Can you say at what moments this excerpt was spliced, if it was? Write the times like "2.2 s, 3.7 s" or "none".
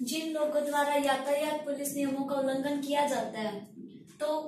none